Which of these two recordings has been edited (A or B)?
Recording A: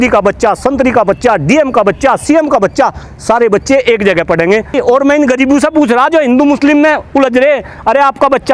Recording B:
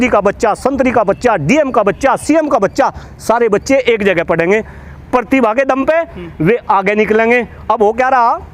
A